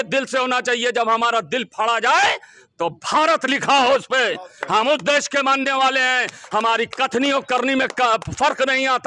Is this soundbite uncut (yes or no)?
yes